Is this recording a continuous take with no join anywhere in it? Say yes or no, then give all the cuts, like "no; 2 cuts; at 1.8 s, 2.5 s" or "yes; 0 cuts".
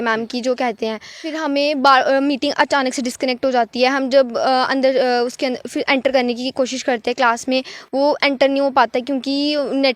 no; 1 cut; at 1.3 s